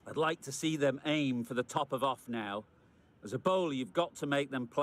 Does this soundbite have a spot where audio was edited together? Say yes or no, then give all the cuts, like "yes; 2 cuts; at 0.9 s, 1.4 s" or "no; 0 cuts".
no; 0 cuts